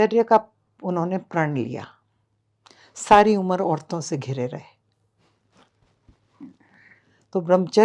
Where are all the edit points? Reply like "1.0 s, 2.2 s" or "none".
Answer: none